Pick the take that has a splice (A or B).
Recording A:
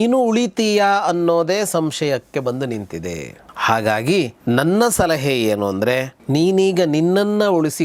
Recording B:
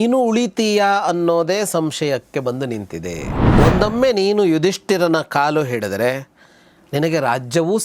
B